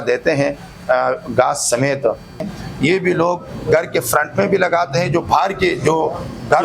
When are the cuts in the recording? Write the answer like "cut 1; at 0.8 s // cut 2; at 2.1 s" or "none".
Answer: cut 1; at 2.4 s